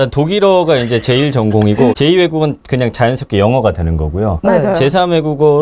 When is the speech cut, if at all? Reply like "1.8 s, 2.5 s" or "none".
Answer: 1.9 s